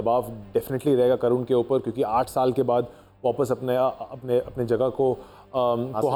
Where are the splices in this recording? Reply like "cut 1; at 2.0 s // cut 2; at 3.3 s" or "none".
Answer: none